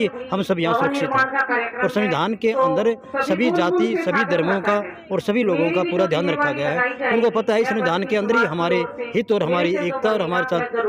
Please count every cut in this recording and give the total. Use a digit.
0